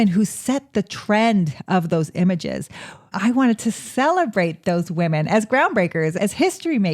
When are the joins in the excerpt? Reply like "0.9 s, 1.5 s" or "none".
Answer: 3.1 s

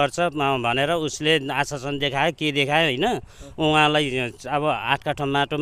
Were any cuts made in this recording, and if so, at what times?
none

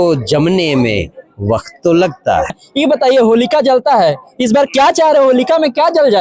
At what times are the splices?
2.6 s

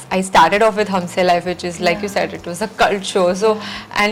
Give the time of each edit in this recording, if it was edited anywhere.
none

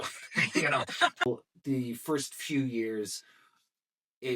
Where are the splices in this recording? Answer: 1.3 s

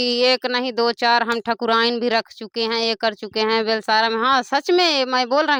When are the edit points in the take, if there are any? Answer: none

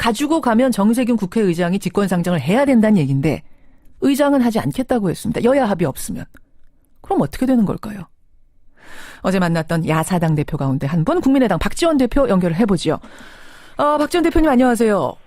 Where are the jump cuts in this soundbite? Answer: 6.6 s

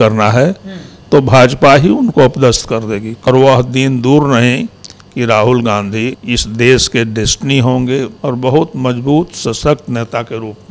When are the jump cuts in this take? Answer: 3.3 s, 6.2 s, 8.1 s

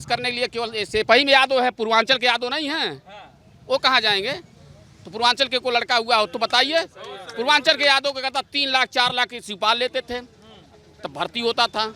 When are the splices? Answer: none

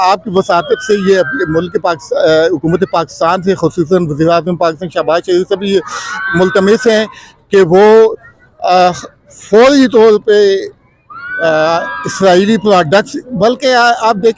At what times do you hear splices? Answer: none

